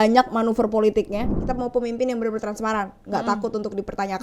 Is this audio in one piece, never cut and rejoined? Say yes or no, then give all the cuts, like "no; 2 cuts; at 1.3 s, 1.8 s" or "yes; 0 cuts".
no; 1 cut; at 1.4 s